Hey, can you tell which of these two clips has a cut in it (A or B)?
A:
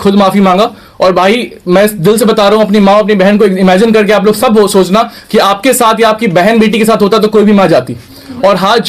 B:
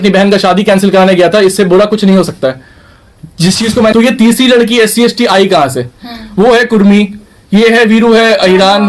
B